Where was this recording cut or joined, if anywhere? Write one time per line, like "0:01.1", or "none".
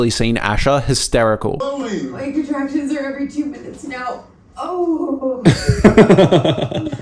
none